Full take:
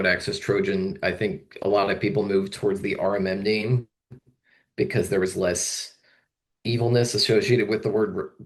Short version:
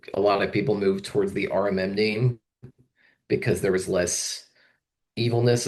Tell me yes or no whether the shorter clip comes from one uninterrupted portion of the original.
yes